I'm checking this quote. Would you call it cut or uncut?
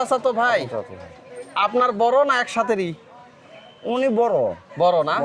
uncut